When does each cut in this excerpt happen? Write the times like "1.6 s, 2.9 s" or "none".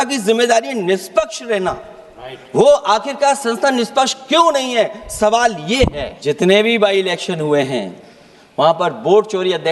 6.1 s